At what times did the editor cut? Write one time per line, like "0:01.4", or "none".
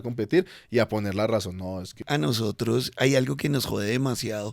0:02.0